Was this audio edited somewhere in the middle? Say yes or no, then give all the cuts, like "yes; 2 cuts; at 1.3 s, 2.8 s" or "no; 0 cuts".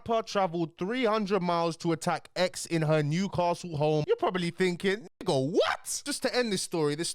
yes; 2 cuts; at 4.0 s, 6.0 s